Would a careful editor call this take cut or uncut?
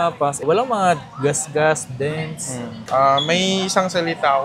cut